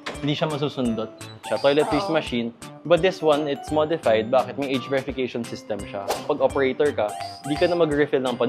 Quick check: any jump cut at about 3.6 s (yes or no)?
no